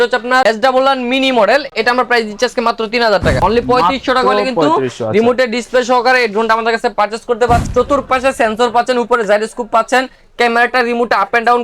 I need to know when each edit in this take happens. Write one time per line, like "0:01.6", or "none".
0:03.4
0:07.7

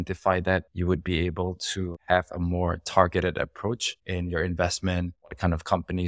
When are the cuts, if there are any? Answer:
0:02.0

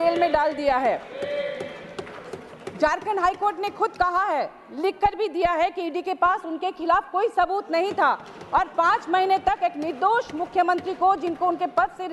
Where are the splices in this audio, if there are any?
none

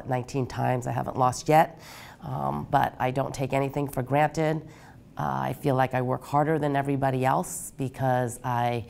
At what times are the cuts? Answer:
none

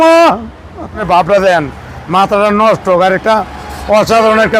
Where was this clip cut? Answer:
0:01.0

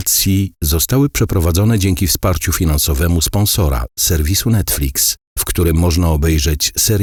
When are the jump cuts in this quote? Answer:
none

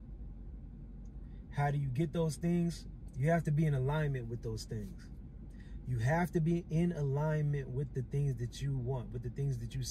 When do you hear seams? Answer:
none

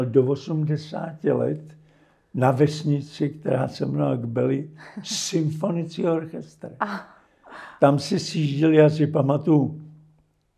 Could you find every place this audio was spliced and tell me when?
none

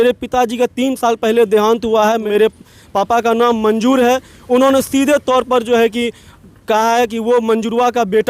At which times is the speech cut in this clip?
0:02.2

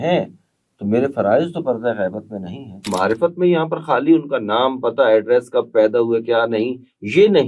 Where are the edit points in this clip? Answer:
0:02.9

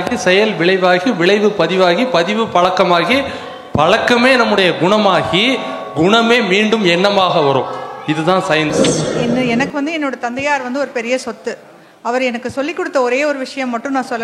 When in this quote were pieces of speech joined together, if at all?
0:09.1

